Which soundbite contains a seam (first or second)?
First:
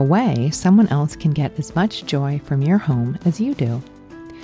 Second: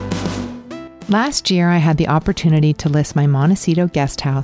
second